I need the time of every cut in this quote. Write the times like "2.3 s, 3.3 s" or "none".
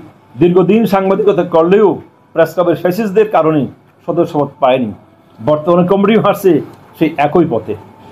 none